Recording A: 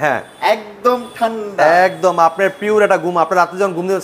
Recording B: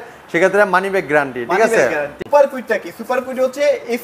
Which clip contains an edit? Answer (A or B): B